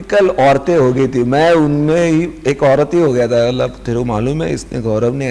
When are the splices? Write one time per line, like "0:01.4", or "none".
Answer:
none